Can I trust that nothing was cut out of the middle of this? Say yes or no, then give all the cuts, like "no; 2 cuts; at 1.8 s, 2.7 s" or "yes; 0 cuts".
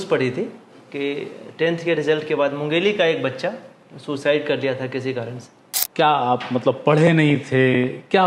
no; 1 cut; at 5.7 s